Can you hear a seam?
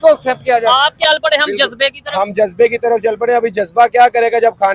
yes; 1 cut; at 1.0 s

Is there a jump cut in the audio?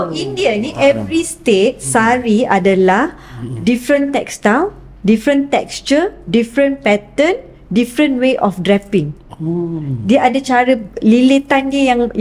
no; 0 cuts

